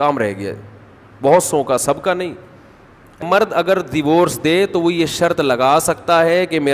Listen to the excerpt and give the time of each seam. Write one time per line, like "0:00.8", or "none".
0:03.2